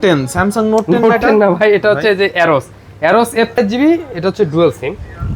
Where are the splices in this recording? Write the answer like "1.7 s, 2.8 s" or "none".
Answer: 3.6 s